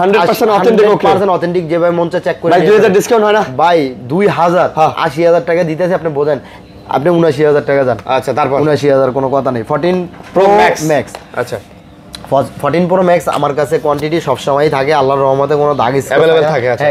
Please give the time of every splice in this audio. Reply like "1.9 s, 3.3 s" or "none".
none